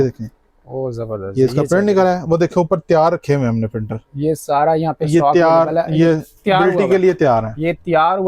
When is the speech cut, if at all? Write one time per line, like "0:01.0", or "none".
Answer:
none